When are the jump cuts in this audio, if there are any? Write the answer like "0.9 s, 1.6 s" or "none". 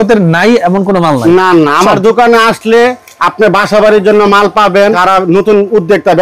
5.0 s